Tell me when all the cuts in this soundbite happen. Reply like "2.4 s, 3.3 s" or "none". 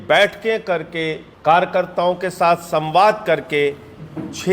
1.2 s